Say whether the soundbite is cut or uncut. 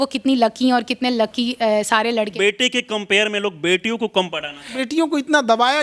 cut